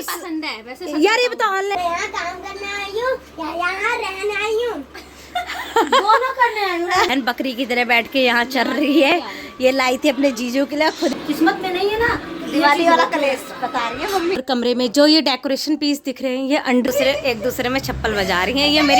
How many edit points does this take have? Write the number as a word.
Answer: five